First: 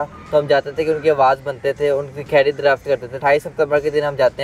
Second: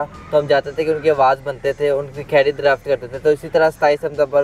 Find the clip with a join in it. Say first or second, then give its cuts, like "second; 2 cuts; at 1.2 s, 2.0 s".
first; 1 cut; at 3.2 s